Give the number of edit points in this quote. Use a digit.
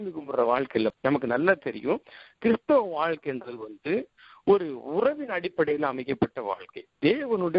1